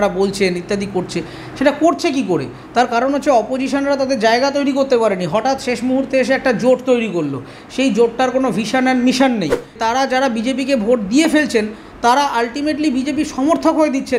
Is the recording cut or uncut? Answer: cut